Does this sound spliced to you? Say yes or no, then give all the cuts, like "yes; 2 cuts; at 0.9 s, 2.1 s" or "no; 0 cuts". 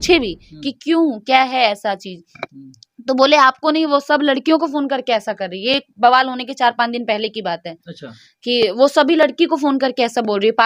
no; 0 cuts